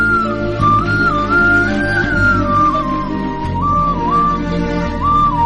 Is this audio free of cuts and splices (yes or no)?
yes